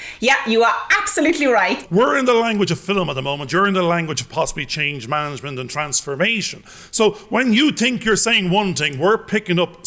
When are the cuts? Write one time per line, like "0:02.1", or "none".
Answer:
0:01.8